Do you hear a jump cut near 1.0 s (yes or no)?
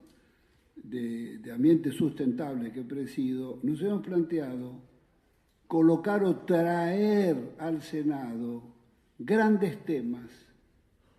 no